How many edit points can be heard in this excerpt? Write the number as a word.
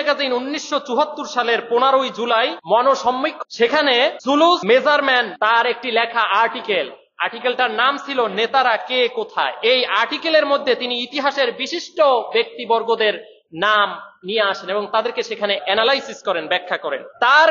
zero